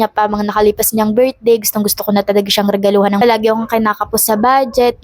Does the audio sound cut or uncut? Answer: cut